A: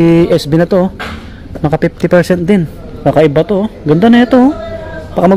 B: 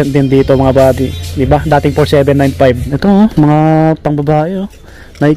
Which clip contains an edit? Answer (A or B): B